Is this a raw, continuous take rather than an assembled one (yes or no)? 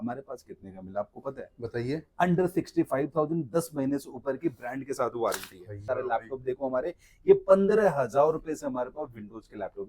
no